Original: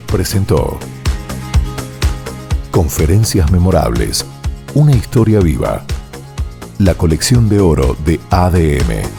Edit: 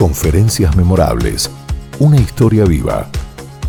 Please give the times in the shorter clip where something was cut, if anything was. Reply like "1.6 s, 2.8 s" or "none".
none